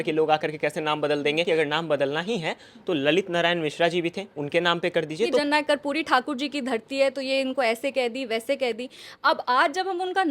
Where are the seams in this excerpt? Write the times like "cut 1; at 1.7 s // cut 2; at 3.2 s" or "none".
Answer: cut 1; at 1.4 s // cut 2; at 5.4 s